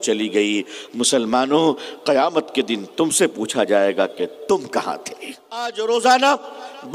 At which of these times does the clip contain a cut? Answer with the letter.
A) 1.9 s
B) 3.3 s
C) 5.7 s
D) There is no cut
C